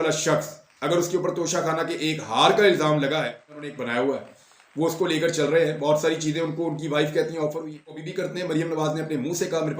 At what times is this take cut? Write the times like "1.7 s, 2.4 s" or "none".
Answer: 3.7 s, 8.1 s